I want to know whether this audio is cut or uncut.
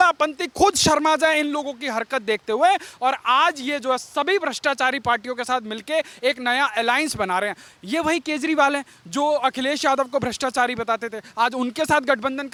uncut